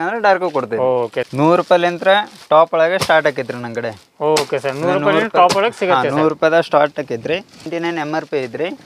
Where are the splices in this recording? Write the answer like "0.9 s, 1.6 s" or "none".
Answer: 1.3 s, 7.7 s